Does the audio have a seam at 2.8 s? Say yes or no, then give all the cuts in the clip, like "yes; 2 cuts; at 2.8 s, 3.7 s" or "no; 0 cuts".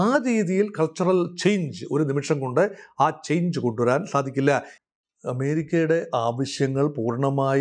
no; 1 cut; at 4.7 s